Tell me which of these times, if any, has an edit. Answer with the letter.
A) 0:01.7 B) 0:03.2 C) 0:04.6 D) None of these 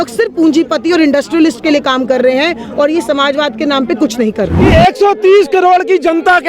C